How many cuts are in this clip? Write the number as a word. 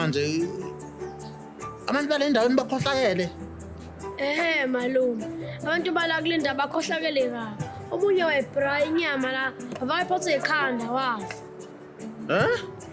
zero